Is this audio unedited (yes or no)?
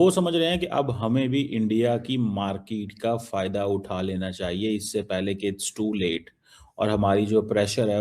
yes